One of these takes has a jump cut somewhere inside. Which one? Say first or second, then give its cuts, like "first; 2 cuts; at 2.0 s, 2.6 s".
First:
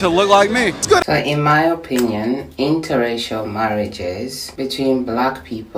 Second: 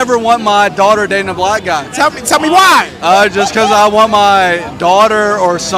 first; 1 cut; at 1.0 s